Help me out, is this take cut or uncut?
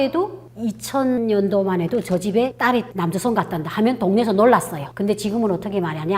cut